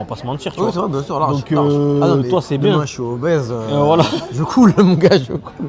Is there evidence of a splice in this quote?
no; 0 cuts

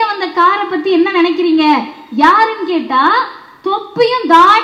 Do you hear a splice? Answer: no; 0 cuts

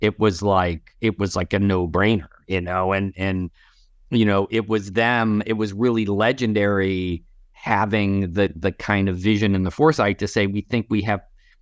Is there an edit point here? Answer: no; 0 cuts

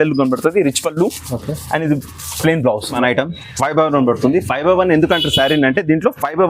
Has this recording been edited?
yes; 1 cut; at 3.0 s

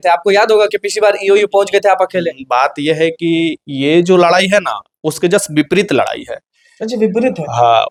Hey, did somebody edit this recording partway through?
no; 0 cuts

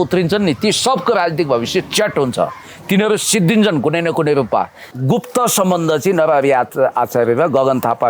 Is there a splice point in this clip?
yes; 1 cut; at 4.9 s

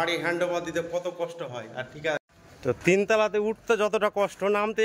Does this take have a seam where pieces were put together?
yes; 1 cut; at 2.2 s

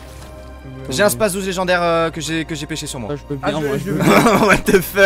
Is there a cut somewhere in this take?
no; 0 cuts

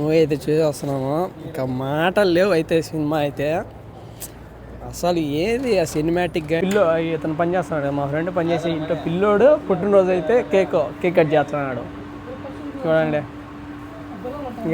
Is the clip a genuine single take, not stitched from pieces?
no; 1 cut; at 6.6 s

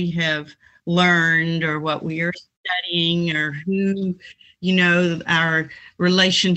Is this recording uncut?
yes; 0 cuts

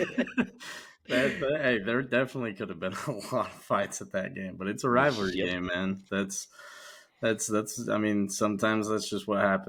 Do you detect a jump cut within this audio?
no; 0 cuts

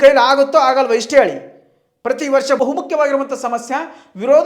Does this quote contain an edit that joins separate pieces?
yes; 1 cut; at 2.6 s

